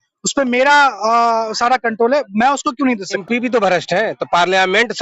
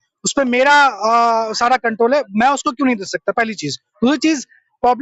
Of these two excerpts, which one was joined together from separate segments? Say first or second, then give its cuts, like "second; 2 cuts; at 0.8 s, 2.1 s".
first; 1 cut; at 3.2 s